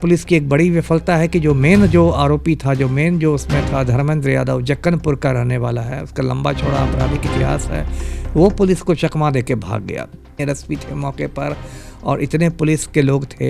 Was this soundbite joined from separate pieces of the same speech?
yes; 1 cut; at 10.4 s

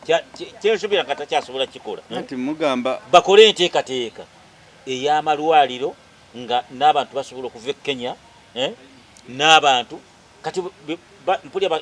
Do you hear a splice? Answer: yes; 1 cut; at 2.0 s

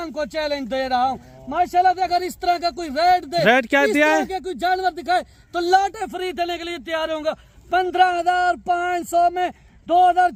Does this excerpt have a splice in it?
no; 0 cuts

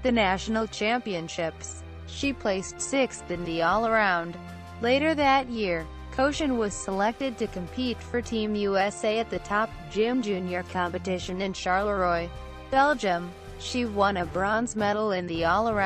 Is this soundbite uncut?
no; 1 cut; at 2.1 s

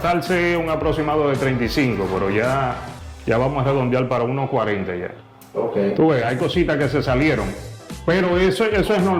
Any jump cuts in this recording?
no; 0 cuts

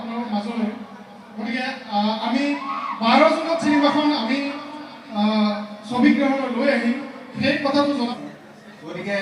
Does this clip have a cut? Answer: yes; 1 cut; at 8.1 s

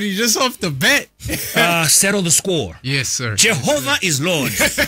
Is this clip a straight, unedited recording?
no; 1 cut; at 1.5 s

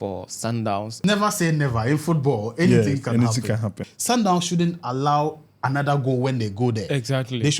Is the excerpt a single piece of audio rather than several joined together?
no; 2 cuts; at 0.9 s, 3.8 s

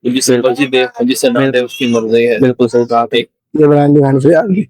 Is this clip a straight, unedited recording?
no; 1 cut; at 3.4 s

